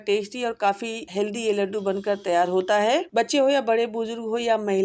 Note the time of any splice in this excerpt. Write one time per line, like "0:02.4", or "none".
0:01.0
0:03.1

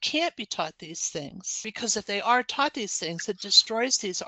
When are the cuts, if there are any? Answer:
0:01.7

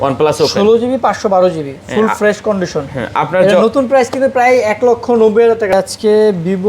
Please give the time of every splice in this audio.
0:05.7

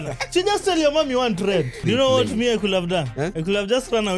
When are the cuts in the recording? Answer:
0:01.8
0:03.4

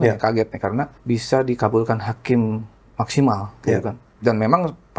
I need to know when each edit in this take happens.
0:01.0
0:04.0

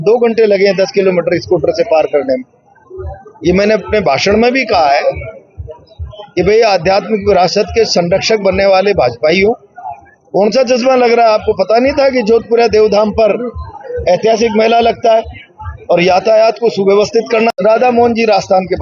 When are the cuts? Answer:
0:17.5

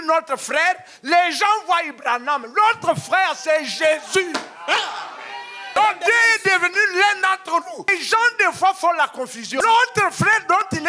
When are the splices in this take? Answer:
0:05.8
0:07.9
0:09.4

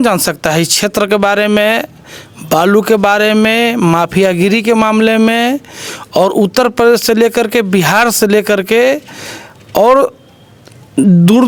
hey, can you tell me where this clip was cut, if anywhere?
none

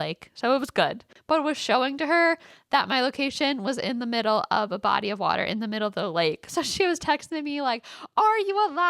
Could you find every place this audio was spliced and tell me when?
0:01.1

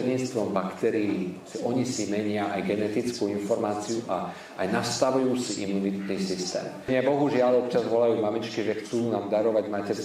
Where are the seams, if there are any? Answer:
0:06.9

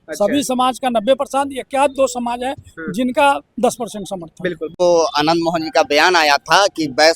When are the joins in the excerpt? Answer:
0:04.8

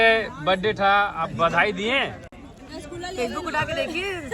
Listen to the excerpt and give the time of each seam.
none

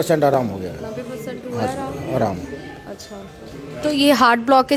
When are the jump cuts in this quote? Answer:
none

